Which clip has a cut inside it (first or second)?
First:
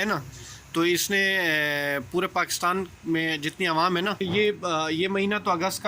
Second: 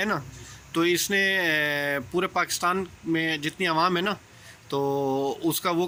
first